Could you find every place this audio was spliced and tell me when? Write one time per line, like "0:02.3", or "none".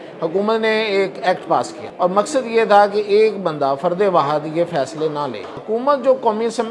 0:01.8
0:05.6